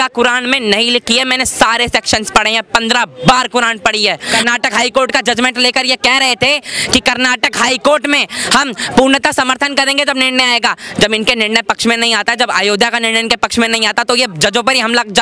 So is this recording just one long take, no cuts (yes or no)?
no